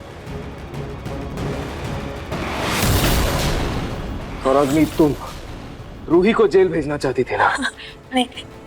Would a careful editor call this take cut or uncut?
uncut